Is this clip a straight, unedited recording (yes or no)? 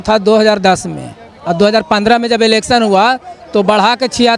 yes